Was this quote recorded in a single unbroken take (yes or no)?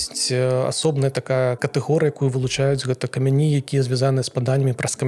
yes